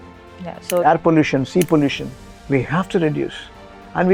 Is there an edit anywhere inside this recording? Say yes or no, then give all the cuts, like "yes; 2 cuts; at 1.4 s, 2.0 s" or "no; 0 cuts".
no; 0 cuts